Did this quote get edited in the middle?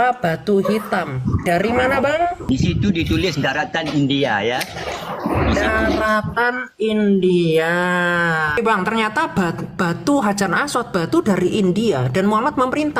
yes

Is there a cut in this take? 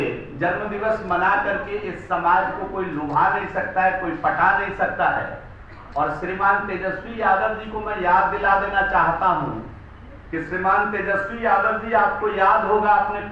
no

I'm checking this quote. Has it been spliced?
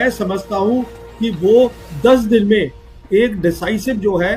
no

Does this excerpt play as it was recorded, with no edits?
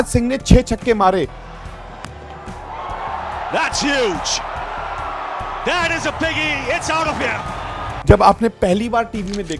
yes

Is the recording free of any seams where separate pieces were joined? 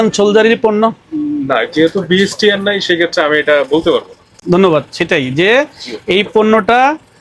yes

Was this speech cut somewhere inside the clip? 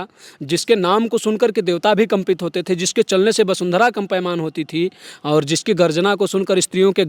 no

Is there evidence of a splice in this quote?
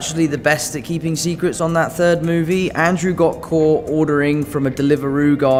no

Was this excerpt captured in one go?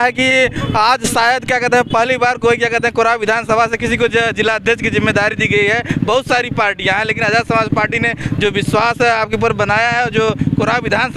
yes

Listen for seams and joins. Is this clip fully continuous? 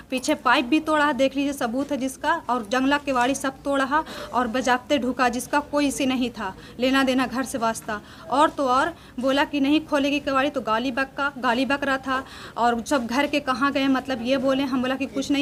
yes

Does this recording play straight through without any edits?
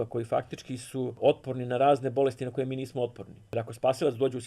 no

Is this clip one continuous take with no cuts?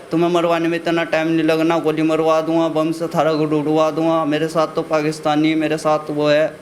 yes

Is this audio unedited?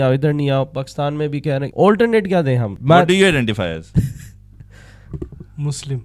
no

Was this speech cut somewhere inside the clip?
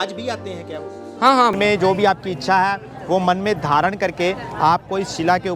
yes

